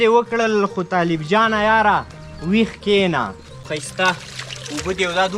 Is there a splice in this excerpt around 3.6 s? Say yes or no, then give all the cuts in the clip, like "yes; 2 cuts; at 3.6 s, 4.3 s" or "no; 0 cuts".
yes; 1 cut; at 3.6 s